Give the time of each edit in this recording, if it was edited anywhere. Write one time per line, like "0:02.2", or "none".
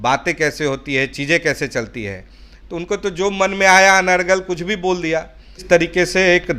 0:05.6